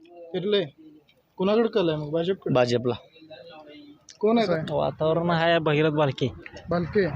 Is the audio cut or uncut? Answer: cut